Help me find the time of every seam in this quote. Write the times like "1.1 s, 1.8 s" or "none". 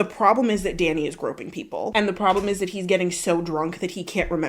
1.9 s